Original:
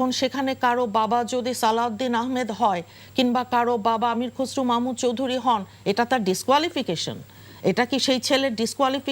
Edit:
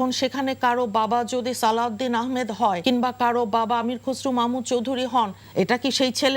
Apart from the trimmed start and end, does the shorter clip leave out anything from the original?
yes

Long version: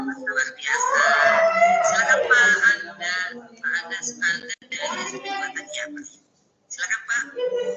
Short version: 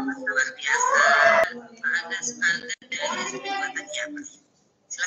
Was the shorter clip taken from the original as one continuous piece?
no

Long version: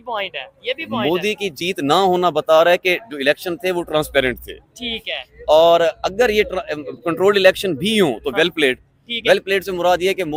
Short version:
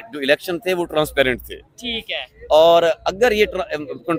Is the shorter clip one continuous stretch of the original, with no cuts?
yes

